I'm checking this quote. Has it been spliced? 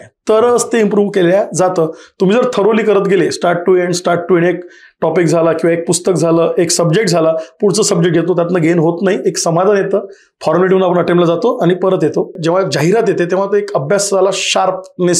yes; 1 cut; at 12.4 s

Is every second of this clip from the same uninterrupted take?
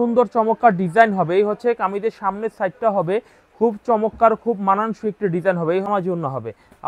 no; 1 cut; at 5.9 s

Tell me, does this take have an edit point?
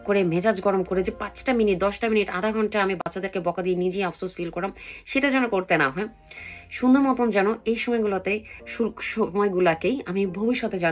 no; 0 cuts

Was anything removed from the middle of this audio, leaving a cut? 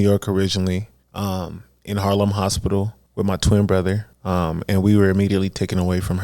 yes; 3 cuts; at 1.0 s, 3.0 s, 4.1 s

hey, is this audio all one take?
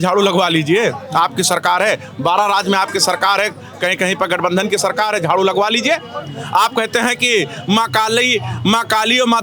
yes; 0 cuts

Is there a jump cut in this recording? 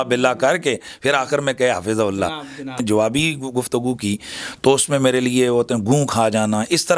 yes; 1 cut; at 2.8 s

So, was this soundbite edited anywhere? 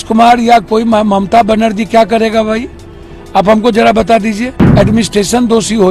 yes; 1 cut; at 4.6 s

